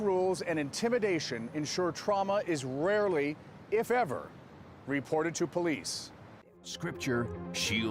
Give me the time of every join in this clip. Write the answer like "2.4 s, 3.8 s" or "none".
6.7 s